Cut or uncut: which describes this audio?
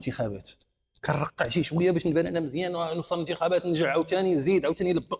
uncut